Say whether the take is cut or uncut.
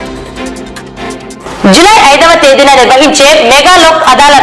cut